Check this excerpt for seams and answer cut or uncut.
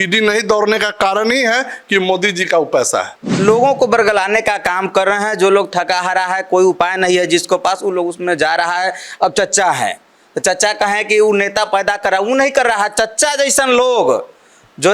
cut